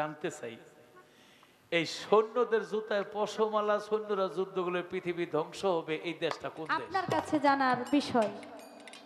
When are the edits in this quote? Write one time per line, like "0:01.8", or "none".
0:06.8